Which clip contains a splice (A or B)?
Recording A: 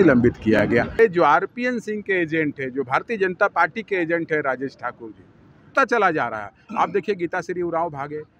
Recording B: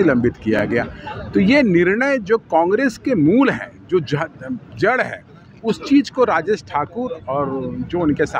A